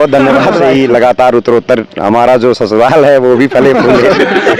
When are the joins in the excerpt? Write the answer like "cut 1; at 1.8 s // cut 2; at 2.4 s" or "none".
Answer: cut 1; at 1.0 s